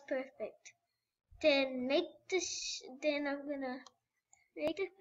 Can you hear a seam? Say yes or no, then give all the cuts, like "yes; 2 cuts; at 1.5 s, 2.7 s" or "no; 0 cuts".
yes; 1 cut; at 2.5 s